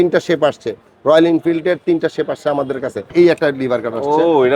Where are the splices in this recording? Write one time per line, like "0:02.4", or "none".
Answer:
0:03.1